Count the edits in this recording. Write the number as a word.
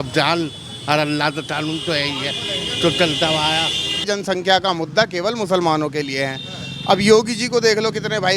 one